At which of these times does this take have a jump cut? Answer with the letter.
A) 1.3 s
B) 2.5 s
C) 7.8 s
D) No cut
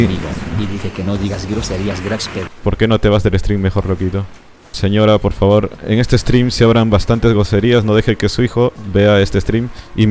B